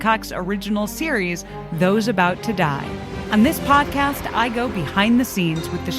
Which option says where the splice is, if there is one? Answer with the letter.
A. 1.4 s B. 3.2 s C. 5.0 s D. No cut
B